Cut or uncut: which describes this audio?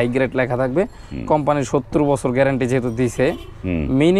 uncut